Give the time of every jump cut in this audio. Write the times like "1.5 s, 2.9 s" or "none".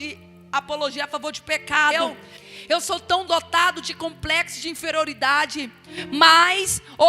1.9 s